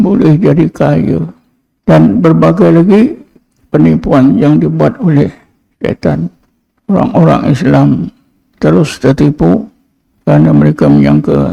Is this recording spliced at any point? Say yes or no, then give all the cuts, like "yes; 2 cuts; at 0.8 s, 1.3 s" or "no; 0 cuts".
no; 0 cuts